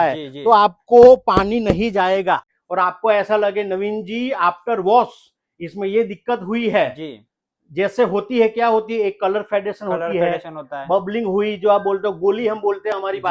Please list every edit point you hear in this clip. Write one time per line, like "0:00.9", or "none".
0:02.5